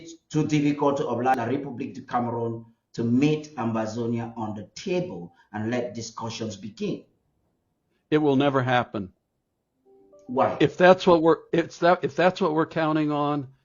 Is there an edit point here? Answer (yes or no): yes